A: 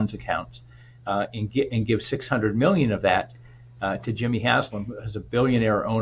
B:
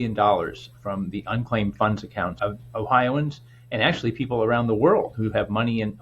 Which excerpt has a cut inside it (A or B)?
B